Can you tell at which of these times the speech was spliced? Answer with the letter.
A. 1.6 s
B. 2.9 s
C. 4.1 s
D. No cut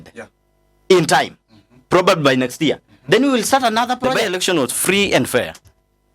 C